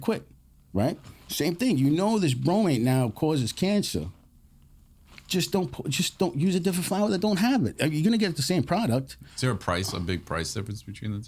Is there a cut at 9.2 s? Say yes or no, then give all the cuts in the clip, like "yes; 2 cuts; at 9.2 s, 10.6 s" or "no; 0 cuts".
yes; 1 cut; at 9.2 s